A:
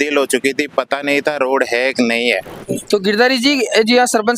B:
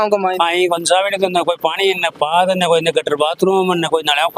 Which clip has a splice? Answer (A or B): A